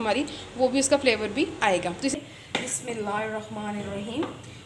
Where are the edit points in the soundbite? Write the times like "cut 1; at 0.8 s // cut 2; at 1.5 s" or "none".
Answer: cut 1; at 2.1 s